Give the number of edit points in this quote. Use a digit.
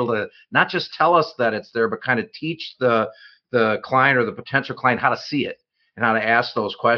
0